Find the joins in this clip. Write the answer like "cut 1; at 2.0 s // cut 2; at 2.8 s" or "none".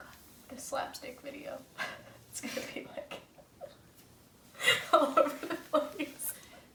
none